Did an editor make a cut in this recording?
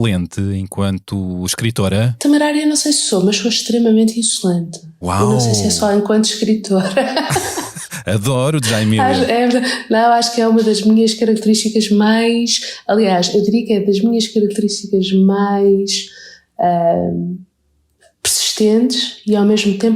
yes; 1 cut; at 2.0 s

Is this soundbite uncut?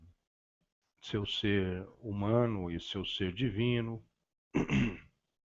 no; 1 cut; at 3.1 s

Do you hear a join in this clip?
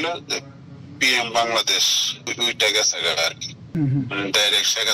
yes; 2 cuts; at 2.3 s, 3.7 s

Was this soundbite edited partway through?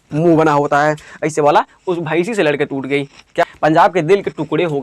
yes; 1 cut; at 3.4 s

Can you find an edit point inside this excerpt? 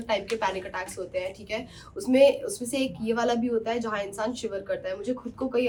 no; 0 cuts

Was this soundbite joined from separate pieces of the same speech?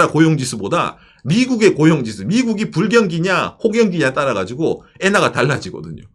no; 0 cuts

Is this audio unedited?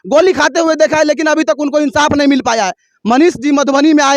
yes; 0 cuts

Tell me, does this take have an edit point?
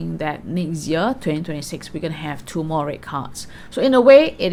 no; 0 cuts

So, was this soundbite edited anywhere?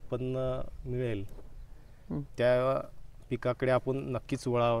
no; 0 cuts

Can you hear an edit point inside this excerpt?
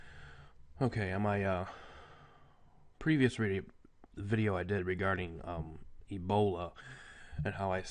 no; 0 cuts

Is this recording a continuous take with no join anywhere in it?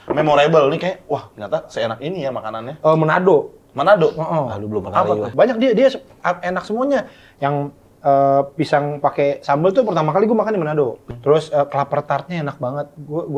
no; 2 cuts; at 5.3 s, 11.0 s

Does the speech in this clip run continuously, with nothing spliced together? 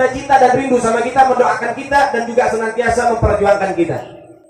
yes; 0 cuts

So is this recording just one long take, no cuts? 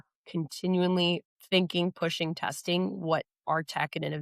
no; 1 cut; at 1.3 s

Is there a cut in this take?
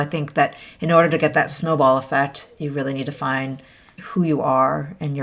yes; 1 cut; at 4.0 s

